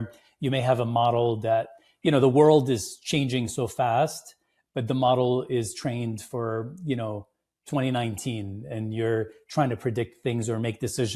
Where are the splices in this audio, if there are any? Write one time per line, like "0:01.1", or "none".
none